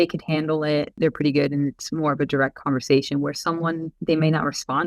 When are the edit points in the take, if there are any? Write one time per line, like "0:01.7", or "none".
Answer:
0:00.9
0:03.9

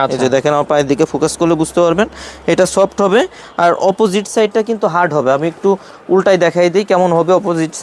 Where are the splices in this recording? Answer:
none

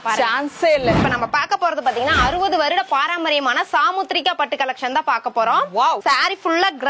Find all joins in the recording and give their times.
0:01.0
0:06.0

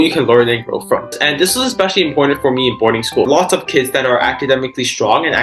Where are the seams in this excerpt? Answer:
0:01.2
0:03.3

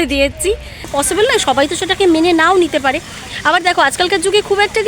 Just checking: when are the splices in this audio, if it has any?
0:00.9

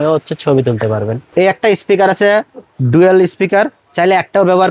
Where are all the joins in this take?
0:01.3

